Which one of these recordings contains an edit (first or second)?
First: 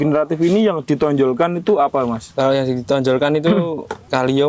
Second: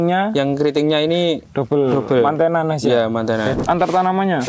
second